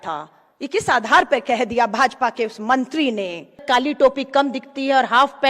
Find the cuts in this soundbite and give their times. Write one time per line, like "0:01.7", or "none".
0:03.6